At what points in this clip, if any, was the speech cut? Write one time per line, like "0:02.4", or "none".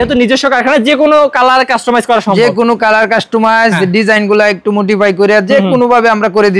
none